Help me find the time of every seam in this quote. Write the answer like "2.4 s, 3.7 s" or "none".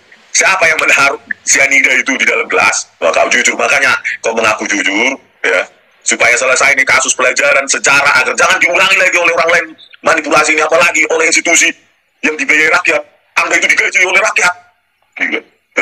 3.0 s